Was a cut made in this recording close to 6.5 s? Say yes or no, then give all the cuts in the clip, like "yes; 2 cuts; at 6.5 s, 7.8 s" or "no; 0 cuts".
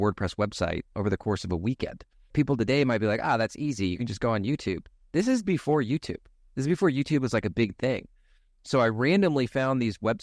no; 1 cut; at 2.3 s